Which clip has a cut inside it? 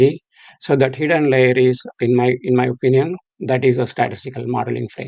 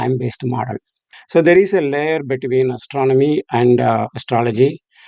second; 1 cut; at 1.0 s

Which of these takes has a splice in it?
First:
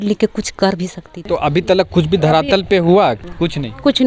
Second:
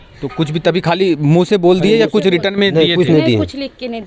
first; 2 cuts; at 1.2 s, 3.2 s

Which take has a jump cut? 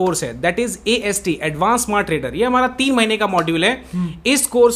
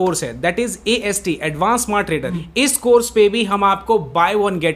second; 1 cut; at 2.3 s

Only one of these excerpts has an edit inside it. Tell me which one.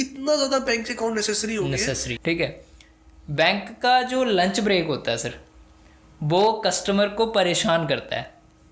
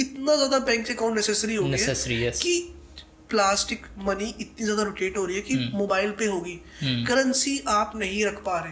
first; 1 cut; at 2.1 s

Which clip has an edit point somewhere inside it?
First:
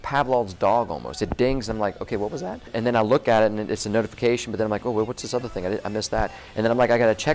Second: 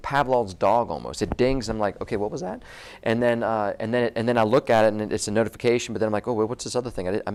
first; 1 cut; at 2.7 s

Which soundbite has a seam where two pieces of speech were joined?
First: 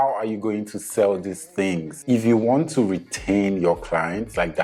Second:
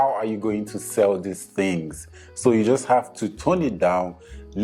first; 1 cut; at 1.9 s

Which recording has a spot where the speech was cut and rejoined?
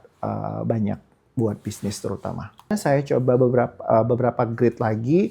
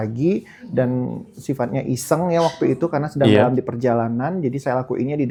first; 1 cut; at 2.7 s

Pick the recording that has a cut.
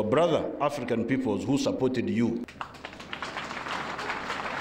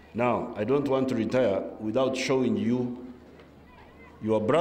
first; 1 cut; at 2.4 s

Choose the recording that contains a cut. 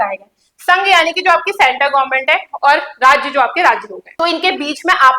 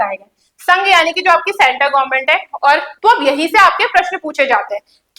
second; 1 cut; at 2.9 s

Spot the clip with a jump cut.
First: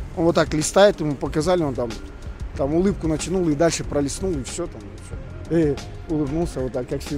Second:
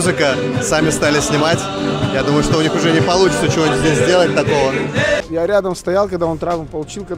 second; 1 cut; at 5.2 s

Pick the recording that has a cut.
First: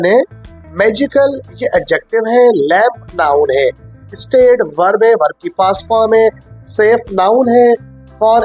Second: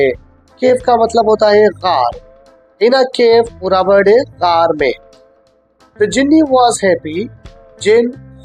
second; 1 cut; at 5.6 s

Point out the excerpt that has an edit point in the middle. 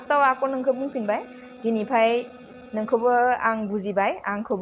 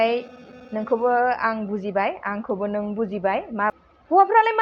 second; 1 cut; at 3.7 s

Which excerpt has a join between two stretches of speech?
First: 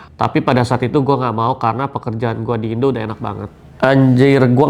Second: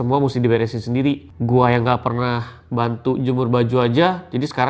first; 1 cut; at 3.6 s

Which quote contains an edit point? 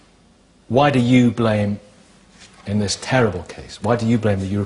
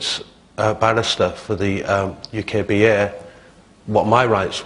second; 1 cut; at 2.8 s

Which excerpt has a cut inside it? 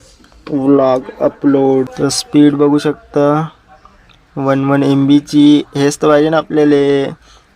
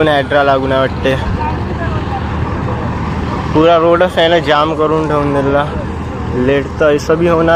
first; 1 cut; at 1.9 s

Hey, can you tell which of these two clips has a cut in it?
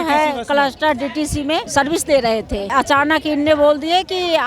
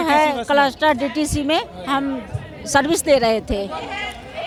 first; 2 cuts; at 1.7 s, 2.7 s

